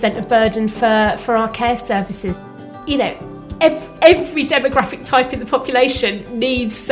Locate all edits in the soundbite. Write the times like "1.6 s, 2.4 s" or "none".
2.4 s